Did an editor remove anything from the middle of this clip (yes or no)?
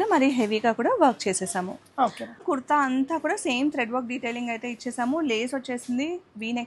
yes